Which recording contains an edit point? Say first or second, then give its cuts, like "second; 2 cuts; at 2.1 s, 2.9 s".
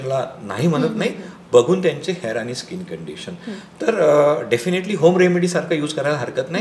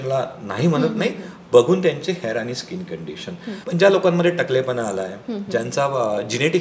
second; 1 cut; at 3.5 s